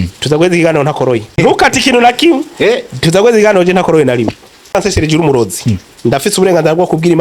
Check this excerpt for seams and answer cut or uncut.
cut